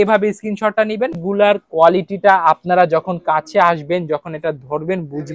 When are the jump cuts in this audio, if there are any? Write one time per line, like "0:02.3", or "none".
0:01.1